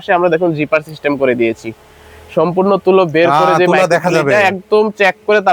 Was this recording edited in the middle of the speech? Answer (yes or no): no